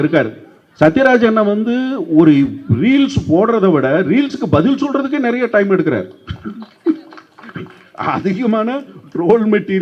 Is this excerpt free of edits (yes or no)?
yes